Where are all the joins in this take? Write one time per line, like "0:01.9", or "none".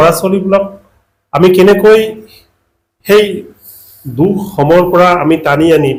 none

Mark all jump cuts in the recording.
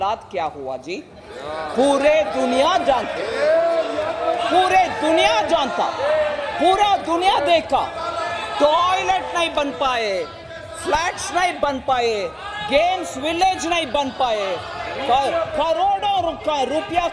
none

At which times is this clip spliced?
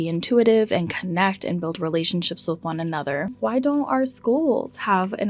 0:03.3

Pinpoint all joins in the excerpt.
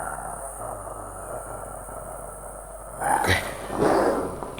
0:03.1

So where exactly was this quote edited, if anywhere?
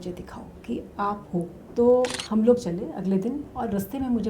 0:01.6

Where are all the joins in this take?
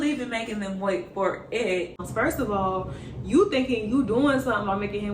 0:02.0

